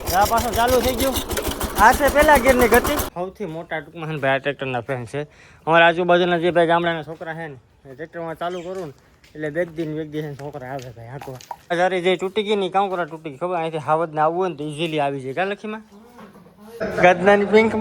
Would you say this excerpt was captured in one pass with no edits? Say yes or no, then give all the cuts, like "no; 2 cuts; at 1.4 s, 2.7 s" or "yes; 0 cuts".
no; 3 cuts; at 3.1 s, 11.7 s, 16.8 s